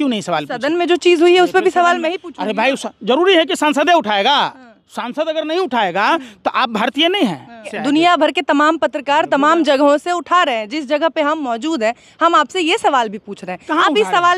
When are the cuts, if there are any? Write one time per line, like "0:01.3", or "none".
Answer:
0:07.7

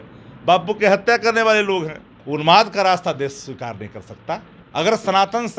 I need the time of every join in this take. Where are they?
0:02.3
0:04.6

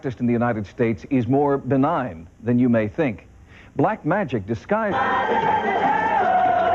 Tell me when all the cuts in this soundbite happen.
none

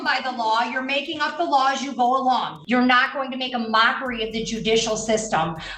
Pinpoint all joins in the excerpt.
0:02.5

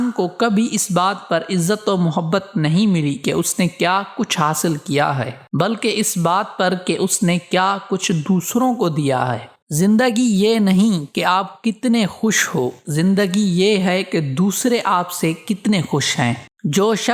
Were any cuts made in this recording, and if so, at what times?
none

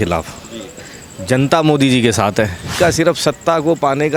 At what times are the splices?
0:02.7

